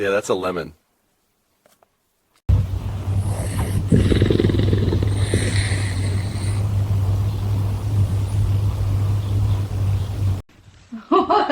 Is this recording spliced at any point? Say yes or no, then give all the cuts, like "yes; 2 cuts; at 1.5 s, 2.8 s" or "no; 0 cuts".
yes; 1 cut; at 2.4 s